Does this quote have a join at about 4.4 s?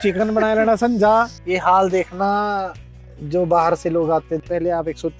yes; 2 cuts; at 1.4 s, 4.4 s

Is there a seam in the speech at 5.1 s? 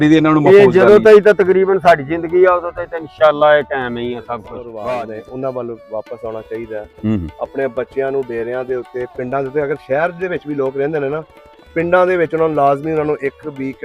yes; 1 cut; at 5.1 s

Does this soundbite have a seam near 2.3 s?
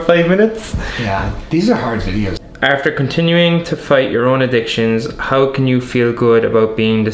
yes; 1 cut; at 2.3 s

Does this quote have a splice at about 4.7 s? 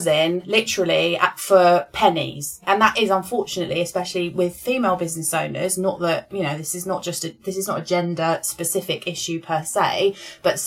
no; 1 cut; at 2.6 s

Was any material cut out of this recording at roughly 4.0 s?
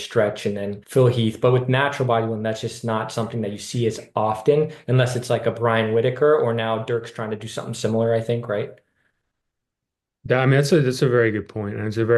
no; 0 cuts

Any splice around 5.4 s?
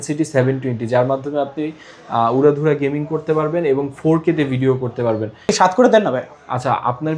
yes; 1 cut; at 5.4 s

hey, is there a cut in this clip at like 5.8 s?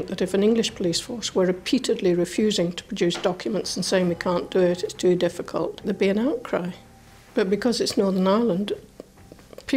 yes; 1 cut; at 5.8 s

